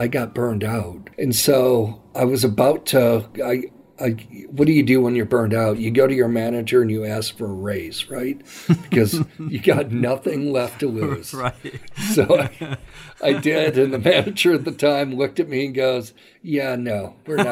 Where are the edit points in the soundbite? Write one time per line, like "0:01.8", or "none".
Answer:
0:01.0